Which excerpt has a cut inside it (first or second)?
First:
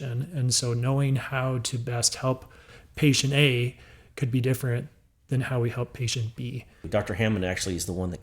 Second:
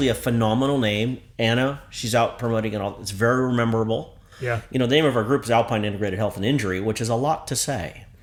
first